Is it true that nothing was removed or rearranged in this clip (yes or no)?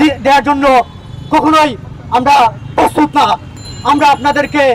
yes